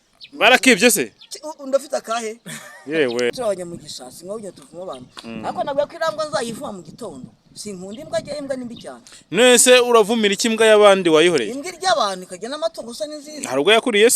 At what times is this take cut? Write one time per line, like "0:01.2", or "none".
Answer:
0:03.3